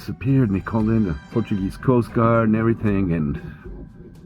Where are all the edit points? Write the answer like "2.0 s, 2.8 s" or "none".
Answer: 1.2 s